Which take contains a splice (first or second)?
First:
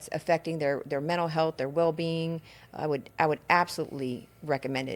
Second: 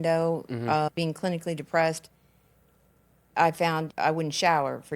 second